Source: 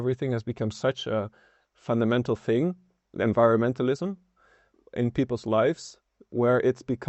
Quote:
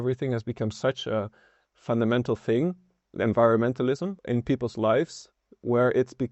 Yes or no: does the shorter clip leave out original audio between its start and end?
yes